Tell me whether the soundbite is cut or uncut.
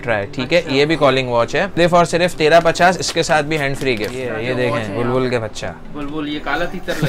cut